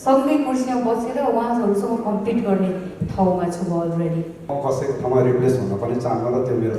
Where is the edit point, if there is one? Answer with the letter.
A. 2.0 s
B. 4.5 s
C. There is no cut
B